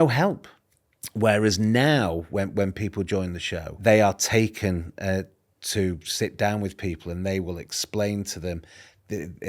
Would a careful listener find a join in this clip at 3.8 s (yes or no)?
yes